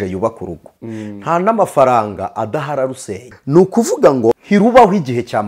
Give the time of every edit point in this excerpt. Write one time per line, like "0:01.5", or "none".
0:03.3
0:04.4